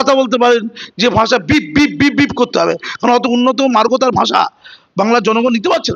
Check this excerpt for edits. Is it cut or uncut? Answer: uncut